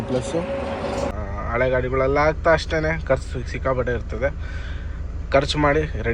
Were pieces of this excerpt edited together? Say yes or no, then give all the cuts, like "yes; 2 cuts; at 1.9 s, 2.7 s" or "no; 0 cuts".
yes; 1 cut; at 1.1 s